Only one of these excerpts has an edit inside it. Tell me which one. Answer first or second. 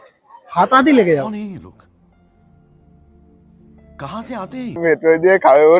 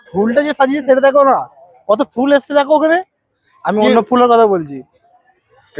first